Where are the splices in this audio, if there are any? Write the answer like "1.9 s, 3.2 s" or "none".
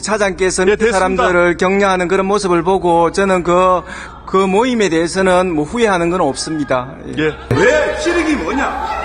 7.5 s